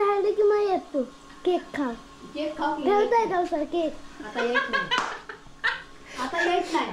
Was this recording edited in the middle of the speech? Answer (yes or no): no